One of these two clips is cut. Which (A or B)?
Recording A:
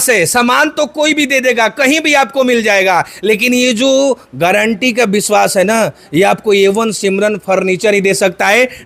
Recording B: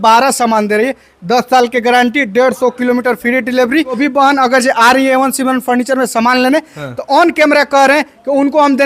B